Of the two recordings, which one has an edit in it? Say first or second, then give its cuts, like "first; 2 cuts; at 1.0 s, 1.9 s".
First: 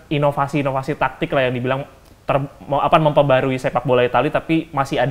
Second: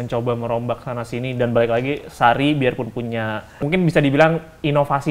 second; 1 cut; at 3.5 s